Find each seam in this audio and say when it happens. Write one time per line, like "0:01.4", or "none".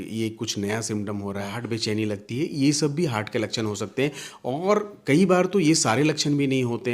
0:01.5